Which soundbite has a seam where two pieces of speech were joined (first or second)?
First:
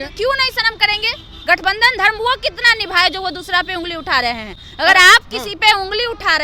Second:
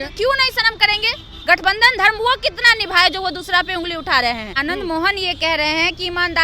second